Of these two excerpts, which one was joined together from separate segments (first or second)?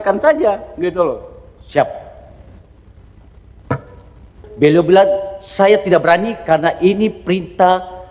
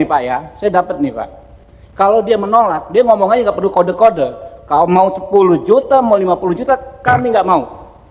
first